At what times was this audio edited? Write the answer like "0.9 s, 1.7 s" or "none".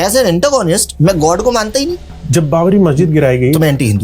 2.1 s